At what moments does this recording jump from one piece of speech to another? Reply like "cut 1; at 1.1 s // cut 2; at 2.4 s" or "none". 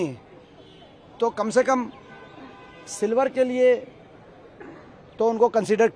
none